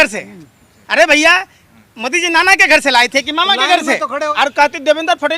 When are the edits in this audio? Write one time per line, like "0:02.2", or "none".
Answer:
0:04.3